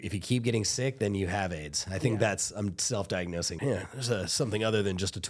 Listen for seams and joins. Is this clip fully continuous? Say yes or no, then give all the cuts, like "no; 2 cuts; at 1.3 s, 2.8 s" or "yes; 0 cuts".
no; 1 cut; at 3.5 s